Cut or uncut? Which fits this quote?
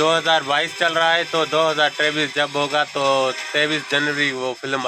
uncut